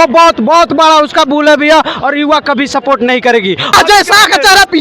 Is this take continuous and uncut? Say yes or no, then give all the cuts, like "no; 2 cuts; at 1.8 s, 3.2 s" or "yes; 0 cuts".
no; 1 cut; at 3.7 s